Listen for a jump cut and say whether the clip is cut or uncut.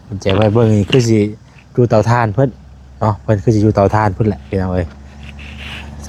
uncut